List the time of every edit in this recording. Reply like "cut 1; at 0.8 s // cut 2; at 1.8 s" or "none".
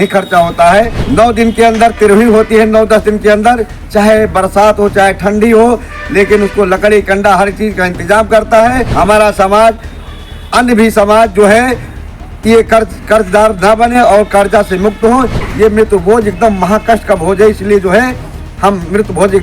cut 1; at 1.0 s // cut 2; at 8.9 s // cut 3; at 15.4 s